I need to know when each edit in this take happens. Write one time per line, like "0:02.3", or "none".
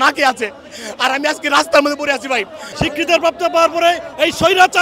0:02.7